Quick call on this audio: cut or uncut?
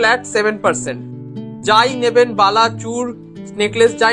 uncut